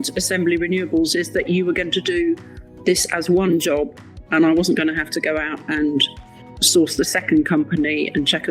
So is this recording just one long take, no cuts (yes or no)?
yes